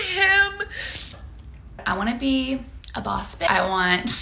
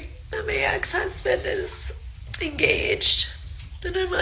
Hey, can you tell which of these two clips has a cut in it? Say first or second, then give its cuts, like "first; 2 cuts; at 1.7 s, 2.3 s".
first; 1 cut; at 1.8 s